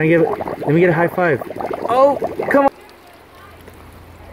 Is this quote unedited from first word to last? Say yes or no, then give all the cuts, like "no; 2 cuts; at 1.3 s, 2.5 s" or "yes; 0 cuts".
no; 1 cut; at 2.7 s